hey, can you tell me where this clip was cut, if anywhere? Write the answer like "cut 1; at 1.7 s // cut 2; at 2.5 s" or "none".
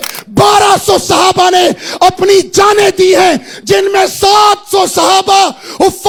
none